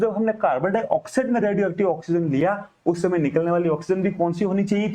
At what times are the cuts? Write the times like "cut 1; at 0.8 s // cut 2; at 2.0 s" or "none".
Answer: none

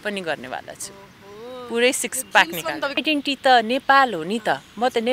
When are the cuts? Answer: cut 1; at 3.0 s

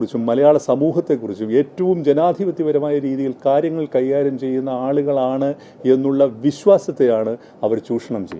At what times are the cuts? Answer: none

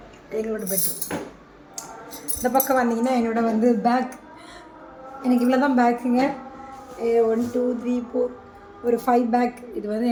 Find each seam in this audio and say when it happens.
none

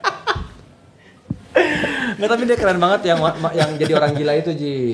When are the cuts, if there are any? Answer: none

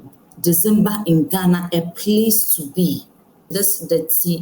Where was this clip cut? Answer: cut 1; at 3.5 s

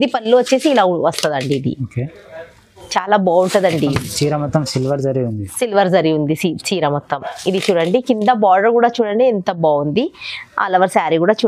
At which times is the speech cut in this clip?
none

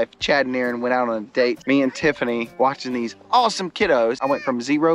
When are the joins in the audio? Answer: cut 1; at 1.6 s // cut 2; at 2.5 s // cut 3; at 4.2 s

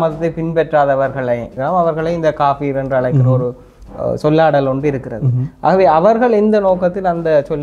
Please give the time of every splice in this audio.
cut 1; at 1.5 s

